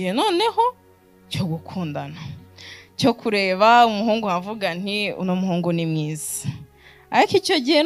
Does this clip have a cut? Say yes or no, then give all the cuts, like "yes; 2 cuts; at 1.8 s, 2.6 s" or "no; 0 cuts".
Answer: no; 0 cuts